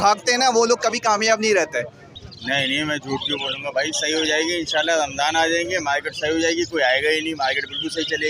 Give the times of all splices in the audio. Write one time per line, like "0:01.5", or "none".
0:02.1